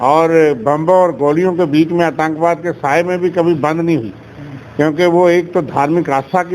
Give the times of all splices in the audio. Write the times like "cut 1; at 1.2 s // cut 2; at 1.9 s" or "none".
none